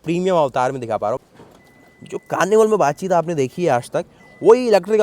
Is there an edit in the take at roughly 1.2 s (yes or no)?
yes